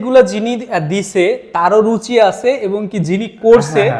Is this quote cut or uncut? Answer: uncut